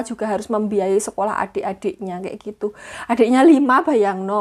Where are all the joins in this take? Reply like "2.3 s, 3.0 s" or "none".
none

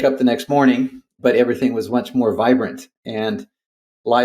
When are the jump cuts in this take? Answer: none

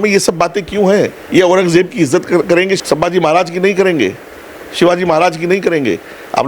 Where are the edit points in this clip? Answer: 2.8 s

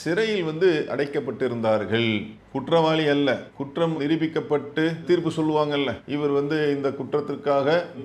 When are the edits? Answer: none

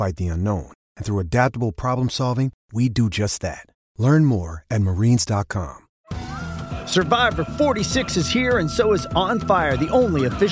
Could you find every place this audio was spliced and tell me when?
5.8 s

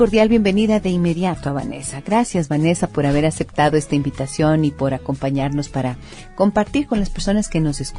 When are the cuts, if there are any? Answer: none

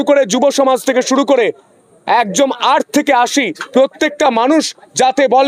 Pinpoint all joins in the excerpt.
none

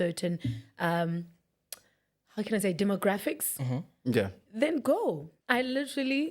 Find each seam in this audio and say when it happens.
5.3 s

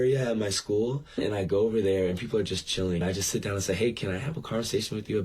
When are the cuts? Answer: 1.2 s, 3.0 s

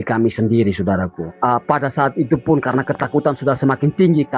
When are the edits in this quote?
1.2 s

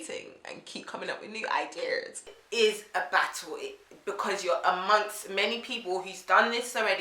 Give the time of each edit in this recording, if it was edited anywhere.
2.4 s

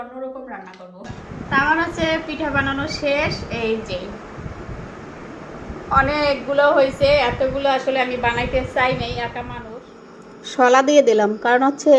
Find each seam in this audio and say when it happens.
1.1 s, 9.6 s

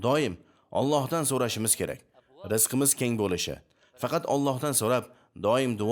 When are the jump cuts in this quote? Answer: none

